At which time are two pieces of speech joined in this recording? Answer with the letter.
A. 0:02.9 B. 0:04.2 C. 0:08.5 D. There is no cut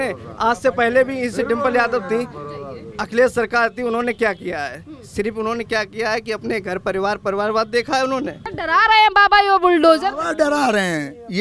C